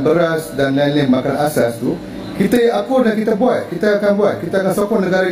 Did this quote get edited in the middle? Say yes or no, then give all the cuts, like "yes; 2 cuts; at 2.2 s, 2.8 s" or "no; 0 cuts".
no; 0 cuts